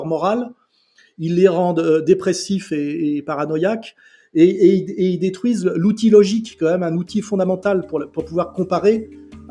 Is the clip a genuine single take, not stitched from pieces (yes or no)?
yes